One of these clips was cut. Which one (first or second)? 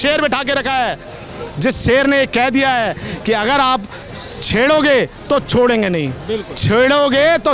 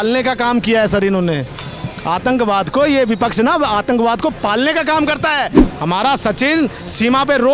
second